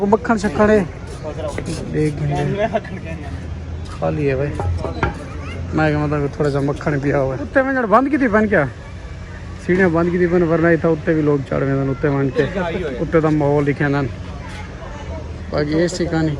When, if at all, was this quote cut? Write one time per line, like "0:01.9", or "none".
0:07.4